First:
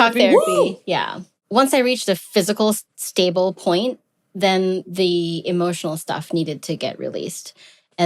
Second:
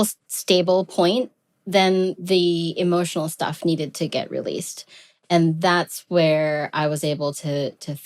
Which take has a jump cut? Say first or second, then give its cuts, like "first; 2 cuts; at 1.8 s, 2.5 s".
first; 1 cut; at 1.4 s